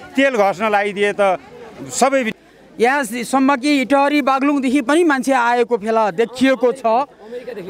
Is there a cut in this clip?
yes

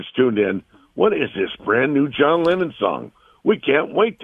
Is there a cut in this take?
no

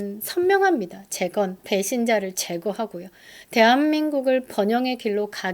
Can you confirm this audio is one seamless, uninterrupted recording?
no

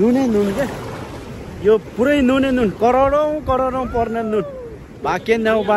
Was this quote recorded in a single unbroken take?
yes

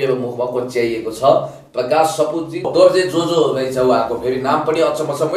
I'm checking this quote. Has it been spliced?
yes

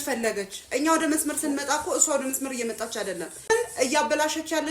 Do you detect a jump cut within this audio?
yes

